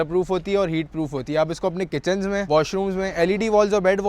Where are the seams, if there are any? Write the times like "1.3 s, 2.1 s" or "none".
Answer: none